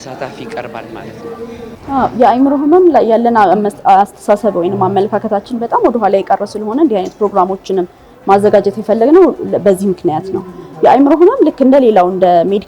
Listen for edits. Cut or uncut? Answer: cut